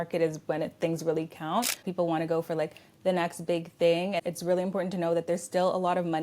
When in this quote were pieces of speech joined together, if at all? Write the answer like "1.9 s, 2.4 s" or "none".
1.9 s, 4.2 s